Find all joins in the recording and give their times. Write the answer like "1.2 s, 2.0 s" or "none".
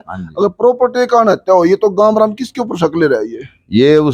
none